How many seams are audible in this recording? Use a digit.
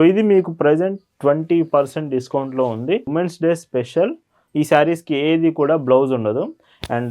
1